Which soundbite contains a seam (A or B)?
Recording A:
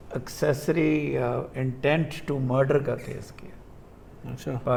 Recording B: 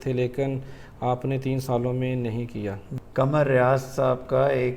B